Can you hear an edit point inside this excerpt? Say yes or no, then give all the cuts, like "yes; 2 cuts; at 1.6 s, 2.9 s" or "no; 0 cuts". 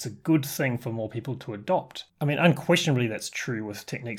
yes; 1 cut; at 2.0 s